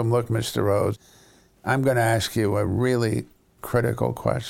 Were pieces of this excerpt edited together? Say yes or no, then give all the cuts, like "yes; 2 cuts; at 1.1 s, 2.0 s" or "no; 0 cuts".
yes; 1 cut; at 0.9 s